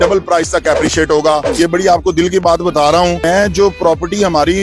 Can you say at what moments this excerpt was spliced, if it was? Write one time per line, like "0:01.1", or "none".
0:01.4
0:03.2

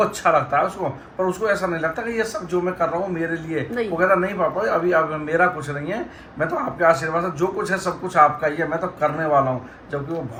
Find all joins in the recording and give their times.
none

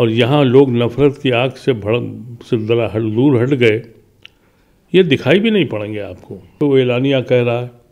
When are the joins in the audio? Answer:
0:06.5

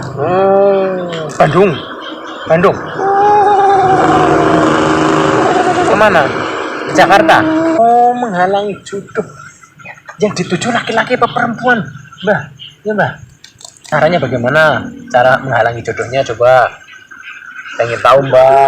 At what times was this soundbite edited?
0:07.8
0:13.9

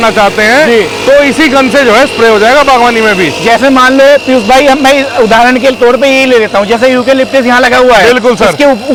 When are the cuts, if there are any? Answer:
none

